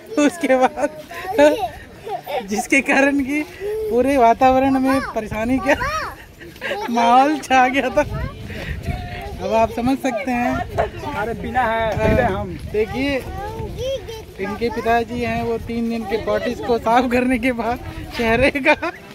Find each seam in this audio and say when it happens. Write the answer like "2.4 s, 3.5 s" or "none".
none